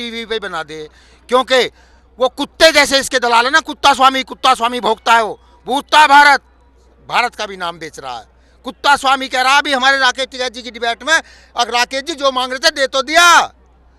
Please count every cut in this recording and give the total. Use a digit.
0